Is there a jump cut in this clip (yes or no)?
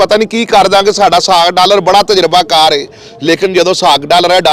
no